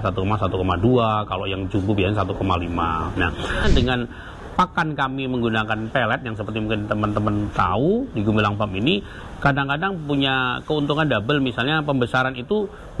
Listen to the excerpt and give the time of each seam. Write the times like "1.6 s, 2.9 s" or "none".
3.6 s